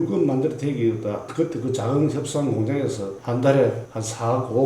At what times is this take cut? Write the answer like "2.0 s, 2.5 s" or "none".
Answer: 1.2 s

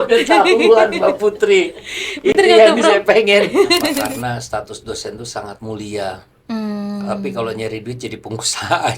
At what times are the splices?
4.0 s

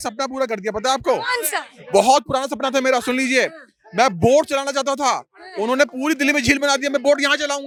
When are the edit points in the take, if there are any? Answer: none

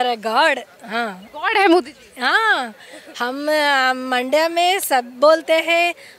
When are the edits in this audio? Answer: none

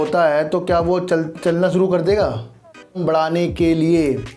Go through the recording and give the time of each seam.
3.0 s

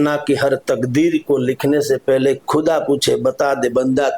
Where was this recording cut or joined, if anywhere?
none

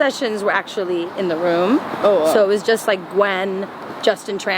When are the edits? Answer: none

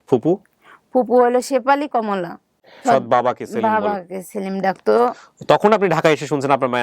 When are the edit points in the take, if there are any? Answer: 2.8 s

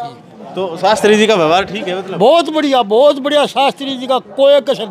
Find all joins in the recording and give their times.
none

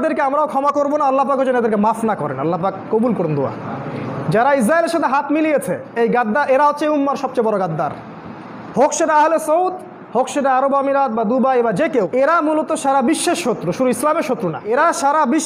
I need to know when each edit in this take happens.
12.1 s, 14.6 s

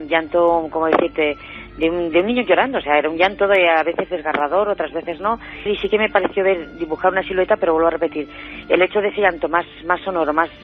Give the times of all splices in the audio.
5.5 s

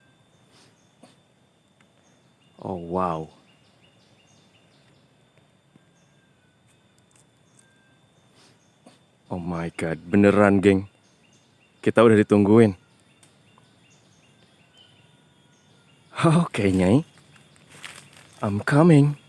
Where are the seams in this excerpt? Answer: 2.1 s, 9.2 s

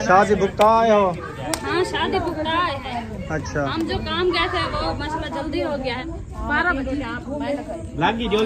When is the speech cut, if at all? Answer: 3.2 s, 6.0 s

